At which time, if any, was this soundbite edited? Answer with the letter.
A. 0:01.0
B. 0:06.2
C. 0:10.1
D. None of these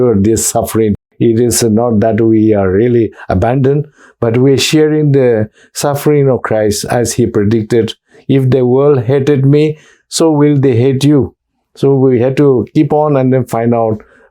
A